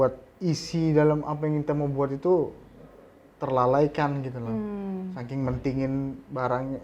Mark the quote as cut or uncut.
uncut